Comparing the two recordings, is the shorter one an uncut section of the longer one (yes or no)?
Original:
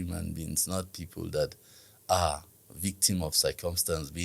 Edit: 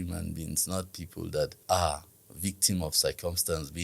no